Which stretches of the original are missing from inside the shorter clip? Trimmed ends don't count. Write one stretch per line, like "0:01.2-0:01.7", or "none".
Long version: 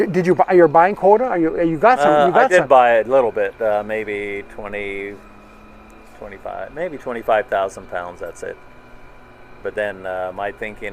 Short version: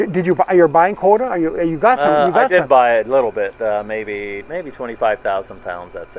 0:04.4-0:06.7